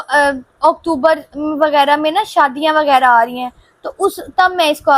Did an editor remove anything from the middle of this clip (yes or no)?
no